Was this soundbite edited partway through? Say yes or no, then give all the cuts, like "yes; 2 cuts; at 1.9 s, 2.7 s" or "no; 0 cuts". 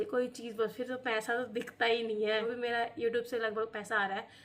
yes; 1 cut; at 2.5 s